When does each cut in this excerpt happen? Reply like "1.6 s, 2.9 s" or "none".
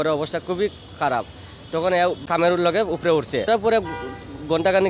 2.2 s, 3.5 s